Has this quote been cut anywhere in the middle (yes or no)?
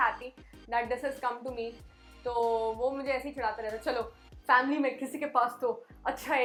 no